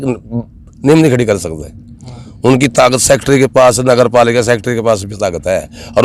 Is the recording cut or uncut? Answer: uncut